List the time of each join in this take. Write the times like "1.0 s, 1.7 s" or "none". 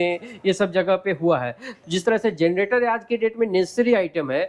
1.7 s